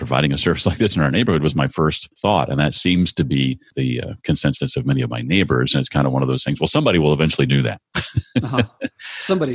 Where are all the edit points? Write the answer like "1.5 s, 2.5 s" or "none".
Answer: 2.1 s, 3.7 s

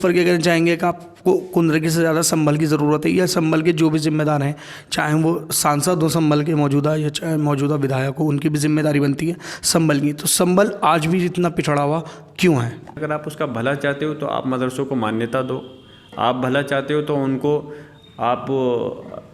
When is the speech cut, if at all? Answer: 13.0 s

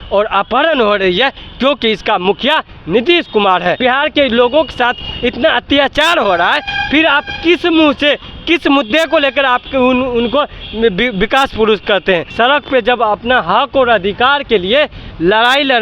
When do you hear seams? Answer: 3.8 s, 12.3 s

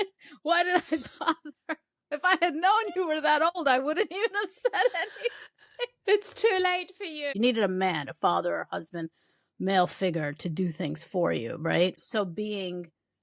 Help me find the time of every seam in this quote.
7.3 s, 12.0 s

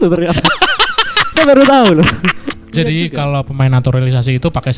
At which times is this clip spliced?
2.7 s

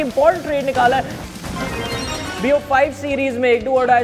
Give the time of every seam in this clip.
1.2 s

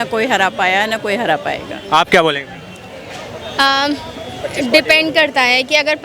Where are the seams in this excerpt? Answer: none

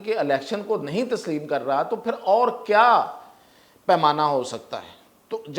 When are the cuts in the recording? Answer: none

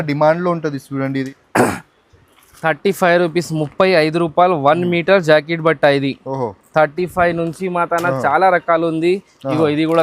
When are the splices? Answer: 1.4 s

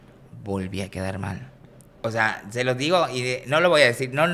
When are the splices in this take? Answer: 2.0 s

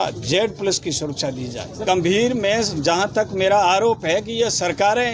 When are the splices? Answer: 1.8 s

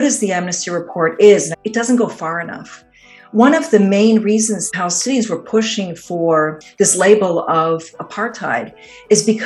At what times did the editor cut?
1.5 s, 4.7 s

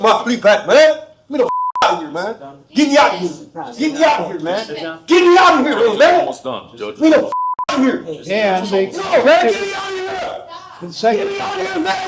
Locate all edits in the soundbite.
none

